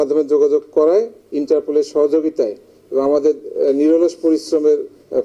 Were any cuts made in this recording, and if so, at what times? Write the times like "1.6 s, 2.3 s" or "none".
none